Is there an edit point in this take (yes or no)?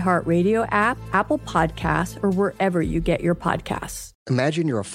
yes